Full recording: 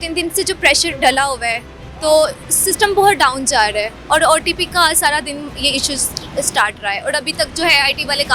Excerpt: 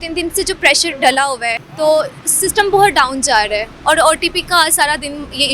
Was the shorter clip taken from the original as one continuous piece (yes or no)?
no